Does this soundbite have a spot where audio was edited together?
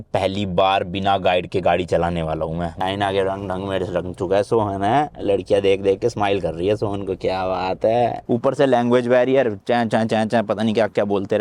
yes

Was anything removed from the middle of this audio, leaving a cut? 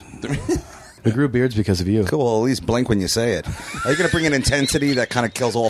yes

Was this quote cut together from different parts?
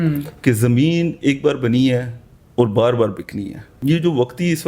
yes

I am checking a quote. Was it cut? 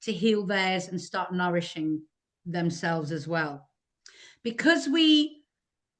no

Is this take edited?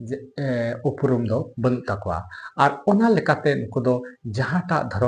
no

